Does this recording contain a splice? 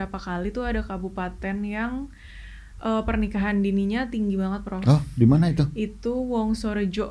no; 0 cuts

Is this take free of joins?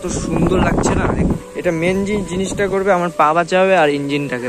no; 1 cut; at 1.5 s

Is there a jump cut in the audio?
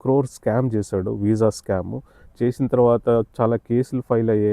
no; 0 cuts

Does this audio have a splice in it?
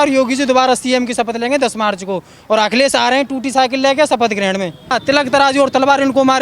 yes; 1 cut; at 4.9 s

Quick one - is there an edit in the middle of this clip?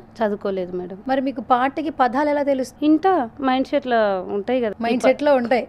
yes; 3 cuts; at 0.9 s, 2.7 s, 4.7 s

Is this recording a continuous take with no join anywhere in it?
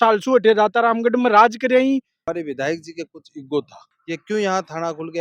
no; 2 cuts; at 2.2 s, 3.8 s

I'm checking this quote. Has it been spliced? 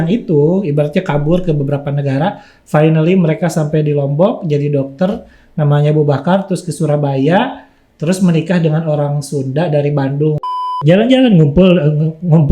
yes; 1 cut; at 10.8 s

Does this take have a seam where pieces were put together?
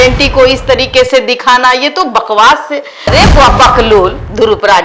yes; 1 cut; at 3.1 s

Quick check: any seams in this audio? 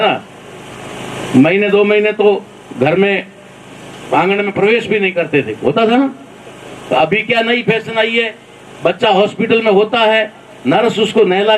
no; 0 cuts

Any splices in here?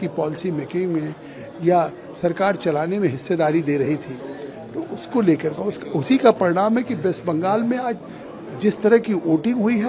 no; 0 cuts

